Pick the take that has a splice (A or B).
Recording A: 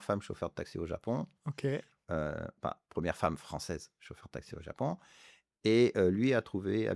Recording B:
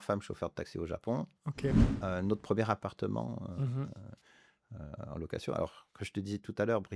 B